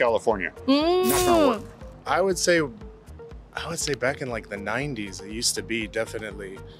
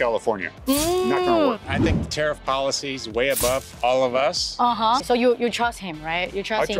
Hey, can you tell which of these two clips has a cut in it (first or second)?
second